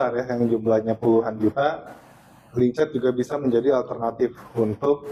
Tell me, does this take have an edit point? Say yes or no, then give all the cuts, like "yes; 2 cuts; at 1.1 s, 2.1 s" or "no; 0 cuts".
no; 0 cuts